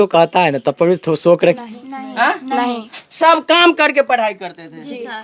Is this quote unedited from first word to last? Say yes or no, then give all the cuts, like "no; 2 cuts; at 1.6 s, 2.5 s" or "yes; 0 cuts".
no; 1 cut; at 1.6 s